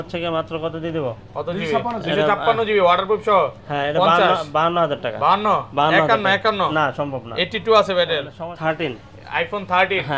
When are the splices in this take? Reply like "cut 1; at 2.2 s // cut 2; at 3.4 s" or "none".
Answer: cut 1; at 8.3 s